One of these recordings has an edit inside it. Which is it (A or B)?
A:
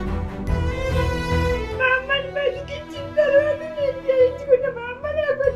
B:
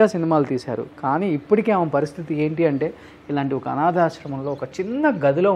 A